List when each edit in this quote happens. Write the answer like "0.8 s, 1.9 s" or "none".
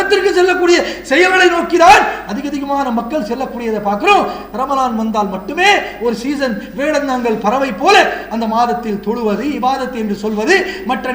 none